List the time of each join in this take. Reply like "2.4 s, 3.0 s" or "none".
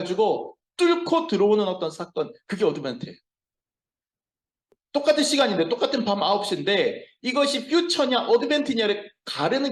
4.7 s